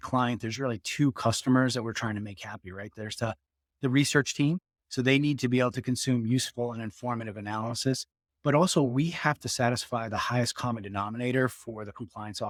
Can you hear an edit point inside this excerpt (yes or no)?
no